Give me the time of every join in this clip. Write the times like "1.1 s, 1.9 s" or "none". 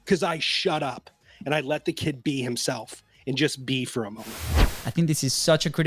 4.7 s